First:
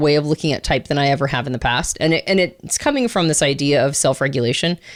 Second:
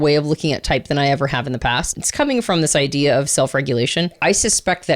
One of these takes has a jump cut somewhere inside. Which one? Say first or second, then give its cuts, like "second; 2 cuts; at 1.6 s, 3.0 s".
second; 2 cuts; at 1.9 s, 4.2 s